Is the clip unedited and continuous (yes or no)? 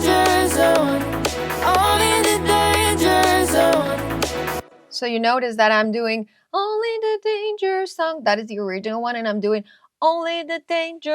no